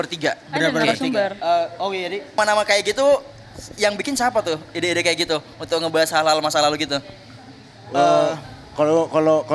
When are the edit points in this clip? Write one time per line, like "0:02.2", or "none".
0:02.4